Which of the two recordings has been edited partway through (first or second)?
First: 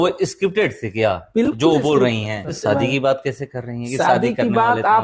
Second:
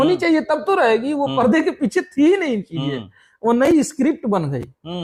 first